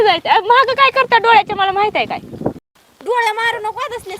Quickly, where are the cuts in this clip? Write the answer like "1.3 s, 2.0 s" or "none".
2.7 s